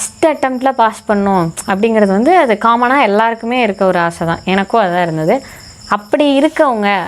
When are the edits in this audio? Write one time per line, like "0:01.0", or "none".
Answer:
none